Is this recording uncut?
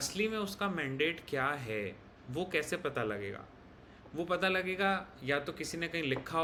yes; 0 cuts

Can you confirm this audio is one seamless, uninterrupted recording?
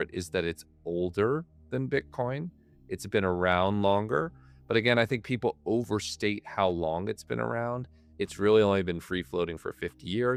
yes; 0 cuts

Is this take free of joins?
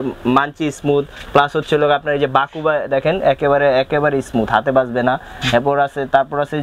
yes; 0 cuts

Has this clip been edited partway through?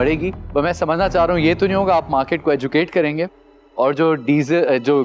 no; 0 cuts

